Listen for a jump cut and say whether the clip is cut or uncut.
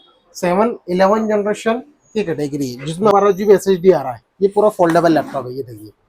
cut